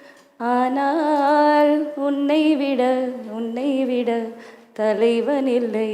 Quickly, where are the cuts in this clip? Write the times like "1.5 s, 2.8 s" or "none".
none